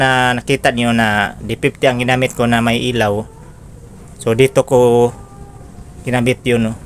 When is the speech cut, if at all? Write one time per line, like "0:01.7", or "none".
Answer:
none